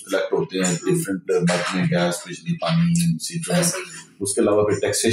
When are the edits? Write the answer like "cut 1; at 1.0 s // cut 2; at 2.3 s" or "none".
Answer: none